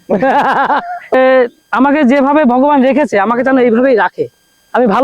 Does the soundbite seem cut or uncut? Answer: cut